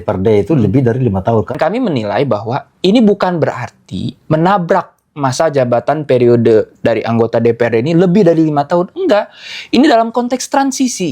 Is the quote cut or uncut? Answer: cut